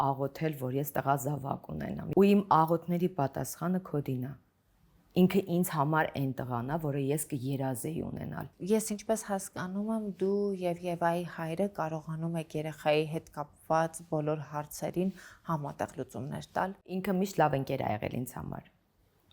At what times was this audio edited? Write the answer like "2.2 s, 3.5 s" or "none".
2.0 s, 8.5 s, 17.0 s